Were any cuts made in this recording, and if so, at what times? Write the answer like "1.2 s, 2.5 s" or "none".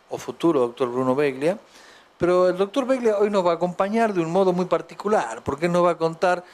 2.1 s